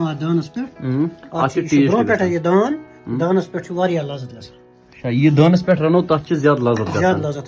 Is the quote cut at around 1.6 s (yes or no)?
no